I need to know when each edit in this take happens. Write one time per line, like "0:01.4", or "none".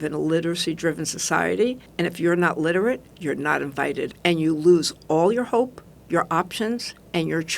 0:01.9
0:04.1